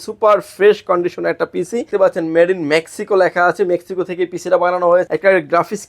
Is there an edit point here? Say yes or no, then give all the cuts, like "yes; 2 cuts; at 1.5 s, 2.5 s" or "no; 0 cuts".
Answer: yes; 2 cuts; at 1.9 s, 5.1 s